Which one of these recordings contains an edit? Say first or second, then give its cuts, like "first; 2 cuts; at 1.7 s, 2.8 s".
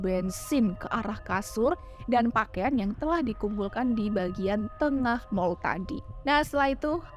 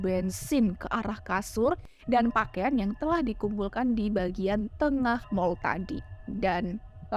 second; 1 cut; at 6.0 s